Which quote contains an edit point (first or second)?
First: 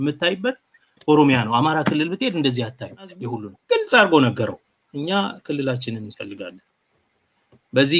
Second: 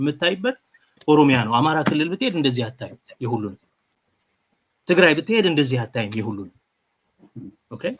first